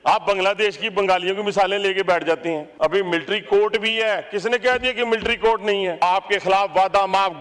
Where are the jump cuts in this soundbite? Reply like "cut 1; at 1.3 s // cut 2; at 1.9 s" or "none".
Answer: cut 1; at 2.7 s // cut 2; at 6.0 s